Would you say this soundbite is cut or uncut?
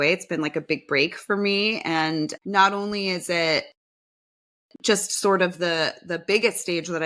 uncut